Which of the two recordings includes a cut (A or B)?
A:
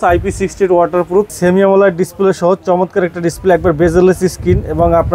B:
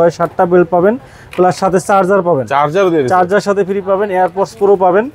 A